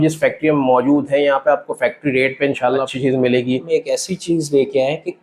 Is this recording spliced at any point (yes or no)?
yes